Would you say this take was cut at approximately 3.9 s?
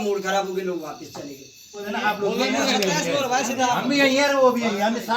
no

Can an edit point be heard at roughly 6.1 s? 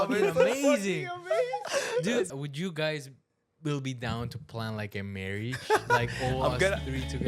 no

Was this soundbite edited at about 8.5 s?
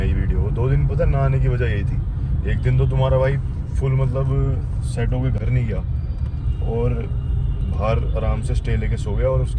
no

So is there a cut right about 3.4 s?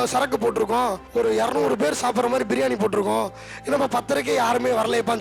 no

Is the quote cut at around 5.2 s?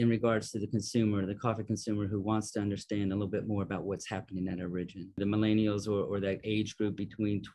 yes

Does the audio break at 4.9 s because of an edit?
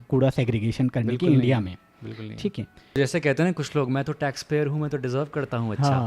no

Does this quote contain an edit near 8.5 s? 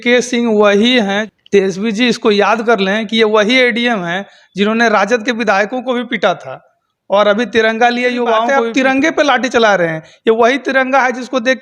yes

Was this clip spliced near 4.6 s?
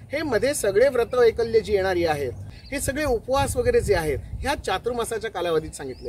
no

